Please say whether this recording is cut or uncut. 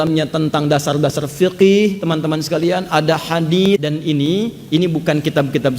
cut